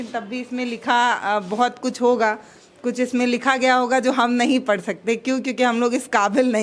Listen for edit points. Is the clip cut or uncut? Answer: uncut